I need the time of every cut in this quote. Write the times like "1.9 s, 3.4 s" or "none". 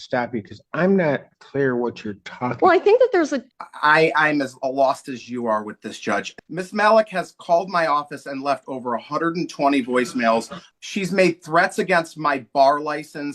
3.4 s, 6.3 s, 10.6 s

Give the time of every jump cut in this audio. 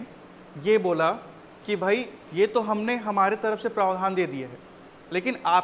none

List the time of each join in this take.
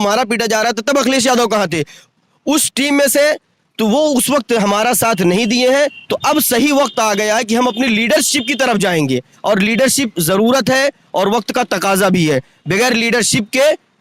none

